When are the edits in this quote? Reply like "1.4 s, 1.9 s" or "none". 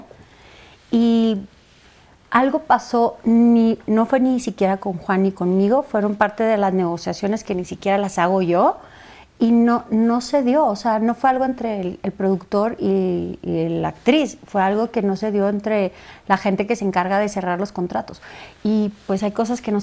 none